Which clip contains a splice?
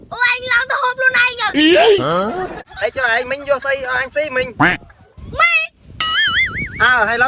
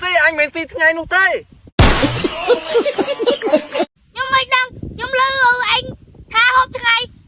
first; 1 cut; at 2.6 s

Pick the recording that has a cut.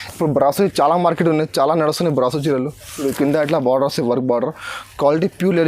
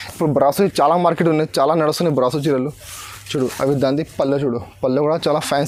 first; 1 cut; at 2.8 s

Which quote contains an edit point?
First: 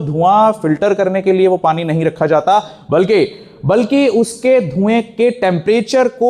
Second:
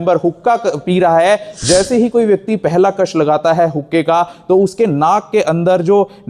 second; 1 cut; at 1.6 s

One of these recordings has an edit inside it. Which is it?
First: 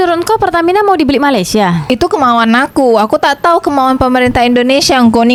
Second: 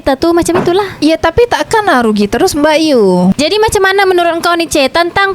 second; 1 cut; at 3.4 s

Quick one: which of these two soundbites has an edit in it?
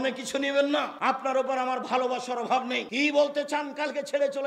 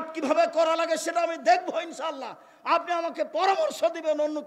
first; 2 cuts; at 0.9 s, 2.9 s

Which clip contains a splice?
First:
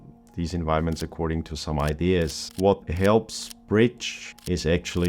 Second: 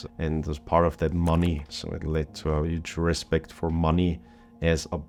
first; 1 cut; at 2.4 s

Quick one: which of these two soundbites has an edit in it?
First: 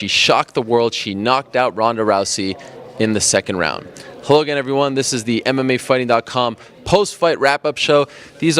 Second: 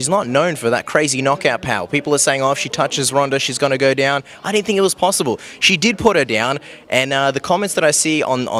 first; 1 cut; at 4.6 s

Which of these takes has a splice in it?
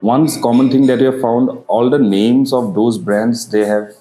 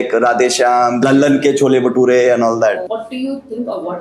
second; 2 cuts; at 1.0 s, 2.9 s

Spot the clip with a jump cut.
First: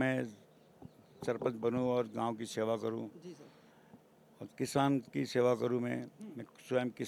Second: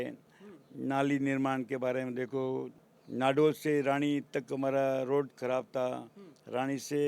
second; 1 cut; at 2.8 s

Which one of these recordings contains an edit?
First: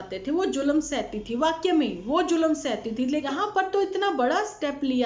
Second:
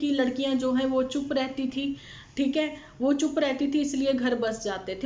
first; 1 cut; at 3.3 s

